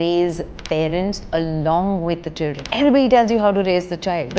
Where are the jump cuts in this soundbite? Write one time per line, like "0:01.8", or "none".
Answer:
0:02.6